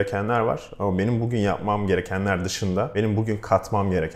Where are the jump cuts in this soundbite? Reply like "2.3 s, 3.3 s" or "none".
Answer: 2.9 s